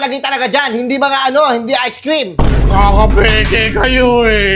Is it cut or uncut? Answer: uncut